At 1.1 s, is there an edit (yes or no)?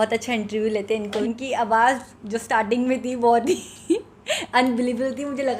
yes